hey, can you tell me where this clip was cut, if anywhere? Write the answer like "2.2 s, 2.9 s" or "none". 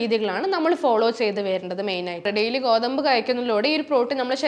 2.3 s